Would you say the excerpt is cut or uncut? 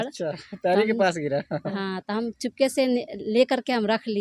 uncut